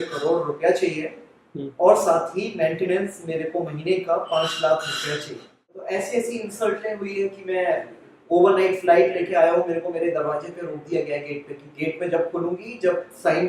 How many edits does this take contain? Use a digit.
1